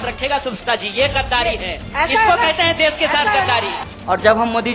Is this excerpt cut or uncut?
cut